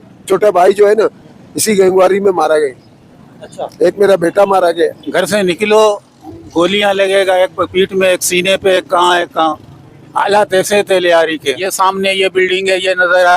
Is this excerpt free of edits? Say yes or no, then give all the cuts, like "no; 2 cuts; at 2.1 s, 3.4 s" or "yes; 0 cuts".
no; 2 cuts; at 5.0 s, 11.7 s